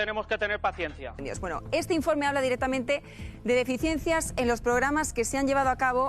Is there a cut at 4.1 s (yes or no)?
no